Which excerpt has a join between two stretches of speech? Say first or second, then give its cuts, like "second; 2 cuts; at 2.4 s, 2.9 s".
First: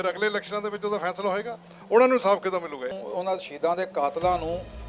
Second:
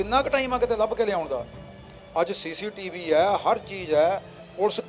first; 1 cut; at 2.9 s